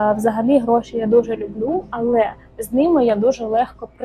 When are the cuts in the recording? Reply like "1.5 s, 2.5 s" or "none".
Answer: none